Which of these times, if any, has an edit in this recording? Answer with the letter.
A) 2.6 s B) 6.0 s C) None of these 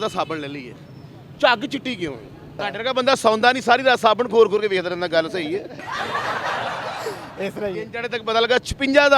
A